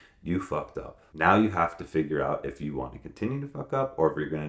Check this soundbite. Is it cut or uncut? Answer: cut